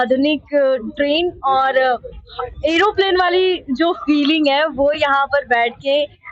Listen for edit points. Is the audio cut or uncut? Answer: uncut